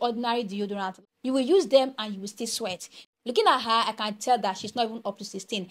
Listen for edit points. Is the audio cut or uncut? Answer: cut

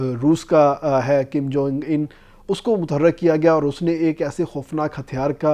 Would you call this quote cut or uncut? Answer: uncut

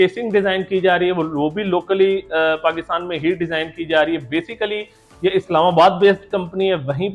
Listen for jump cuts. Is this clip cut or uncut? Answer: uncut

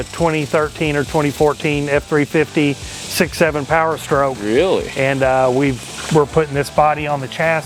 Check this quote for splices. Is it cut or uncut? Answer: uncut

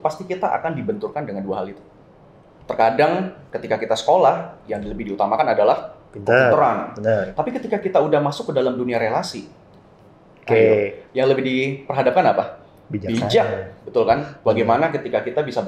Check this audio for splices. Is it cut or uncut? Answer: uncut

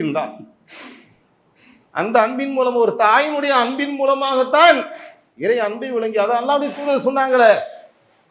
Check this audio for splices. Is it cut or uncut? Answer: uncut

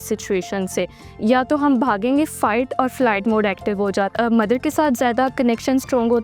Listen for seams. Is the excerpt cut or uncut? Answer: cut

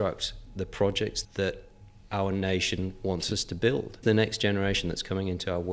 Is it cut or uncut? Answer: cut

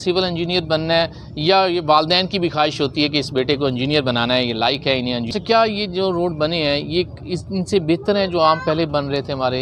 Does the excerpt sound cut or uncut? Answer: cut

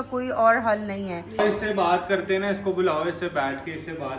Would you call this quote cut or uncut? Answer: cut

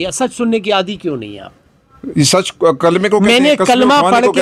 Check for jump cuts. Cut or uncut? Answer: uncut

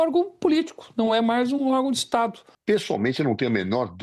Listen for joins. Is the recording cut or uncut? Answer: cut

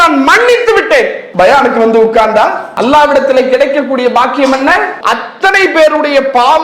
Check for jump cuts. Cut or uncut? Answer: cut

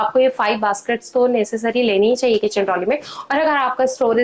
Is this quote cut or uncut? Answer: uncut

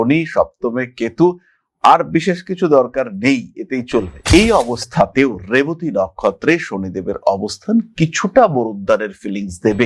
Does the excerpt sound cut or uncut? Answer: uncut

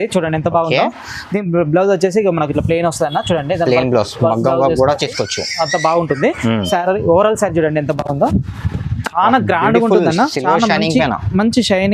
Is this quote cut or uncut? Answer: uncut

